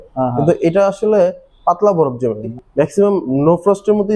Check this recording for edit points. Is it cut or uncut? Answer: cut